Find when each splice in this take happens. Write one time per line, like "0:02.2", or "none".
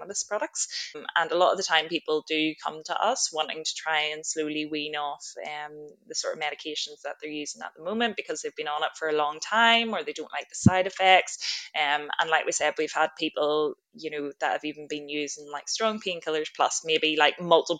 none